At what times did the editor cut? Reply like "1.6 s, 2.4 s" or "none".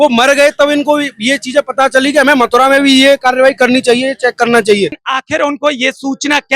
5.0 s